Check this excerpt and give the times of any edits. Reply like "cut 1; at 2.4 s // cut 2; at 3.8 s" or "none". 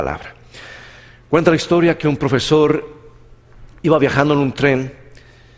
cut 1; at 3.3 s